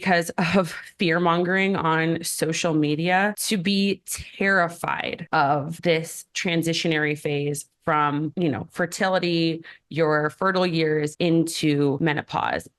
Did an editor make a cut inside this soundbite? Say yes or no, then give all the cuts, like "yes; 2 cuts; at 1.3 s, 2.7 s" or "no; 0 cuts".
yes; 6 cuts; at 3.4 s, 5.1 s, 5.7 s, 8.3 s, 11.1 s, 12.0 s